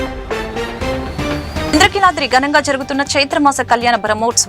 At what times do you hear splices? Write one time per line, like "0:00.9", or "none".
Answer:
0:01.7